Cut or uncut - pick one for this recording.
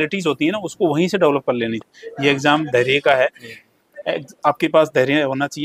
cut